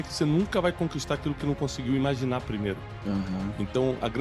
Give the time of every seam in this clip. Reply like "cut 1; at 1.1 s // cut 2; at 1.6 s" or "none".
none